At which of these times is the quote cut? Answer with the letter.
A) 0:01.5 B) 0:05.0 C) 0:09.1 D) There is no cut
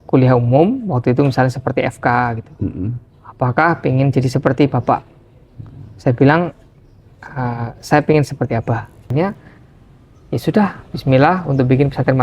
C